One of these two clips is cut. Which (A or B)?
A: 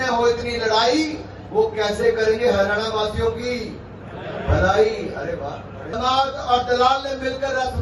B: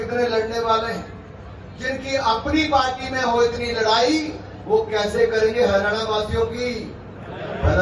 A